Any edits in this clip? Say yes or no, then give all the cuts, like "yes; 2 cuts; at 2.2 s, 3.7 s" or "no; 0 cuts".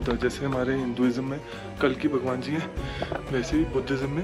no; 0 cuts